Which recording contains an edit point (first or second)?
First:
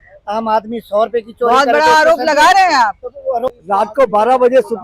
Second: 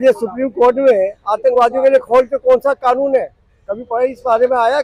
first